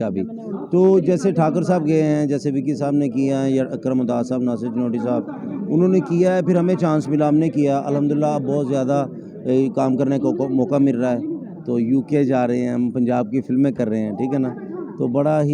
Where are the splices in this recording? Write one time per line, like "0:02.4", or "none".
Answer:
none